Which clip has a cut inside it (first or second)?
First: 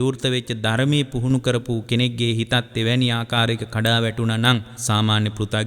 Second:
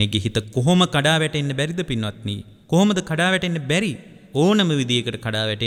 first